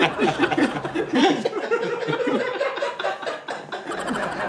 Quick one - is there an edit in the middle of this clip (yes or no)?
no